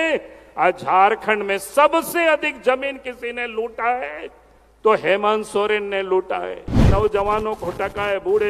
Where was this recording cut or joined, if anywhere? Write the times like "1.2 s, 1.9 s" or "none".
6.9 s